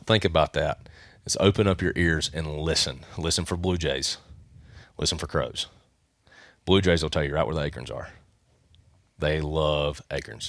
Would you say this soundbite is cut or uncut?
uncut